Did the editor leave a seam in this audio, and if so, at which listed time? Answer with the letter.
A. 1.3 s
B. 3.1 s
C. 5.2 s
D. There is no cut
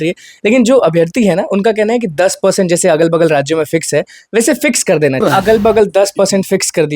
C